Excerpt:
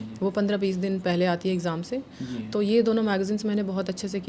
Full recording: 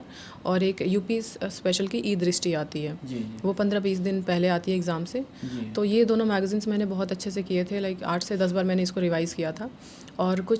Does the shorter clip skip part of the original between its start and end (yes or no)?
no